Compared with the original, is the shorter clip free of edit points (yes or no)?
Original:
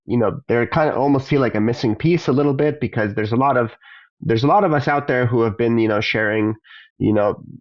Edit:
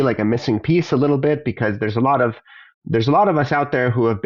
yes